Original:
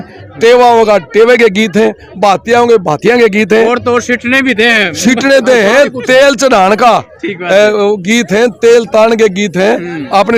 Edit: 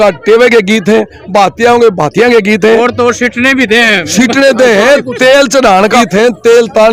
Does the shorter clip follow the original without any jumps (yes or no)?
no